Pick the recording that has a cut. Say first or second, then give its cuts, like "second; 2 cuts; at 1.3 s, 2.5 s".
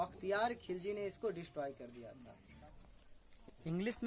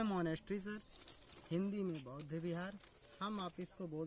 first; 1 cut; at 2.7 s